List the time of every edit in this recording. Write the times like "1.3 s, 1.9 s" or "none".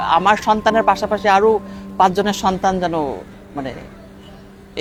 none